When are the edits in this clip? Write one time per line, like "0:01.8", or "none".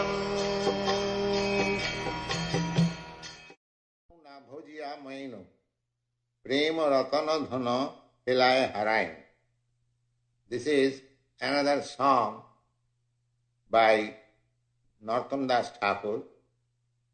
0:01.5